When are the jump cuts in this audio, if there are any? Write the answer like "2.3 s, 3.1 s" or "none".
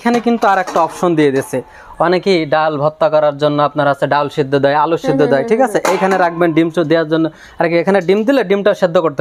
none